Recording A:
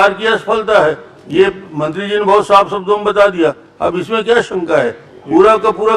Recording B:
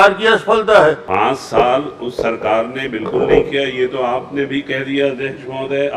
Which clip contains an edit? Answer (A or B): B